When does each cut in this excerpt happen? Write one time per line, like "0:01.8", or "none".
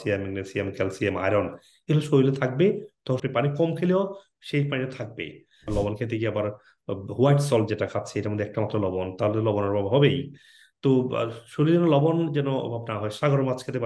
0:05.7